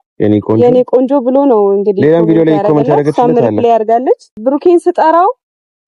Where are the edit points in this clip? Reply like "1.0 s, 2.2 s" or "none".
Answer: 4.3 s